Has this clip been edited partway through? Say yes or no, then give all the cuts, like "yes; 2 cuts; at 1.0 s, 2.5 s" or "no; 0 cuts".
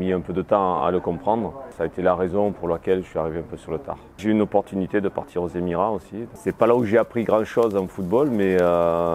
yes; 3 cuts; at 1.7 s, 4.0 s, 6.3 s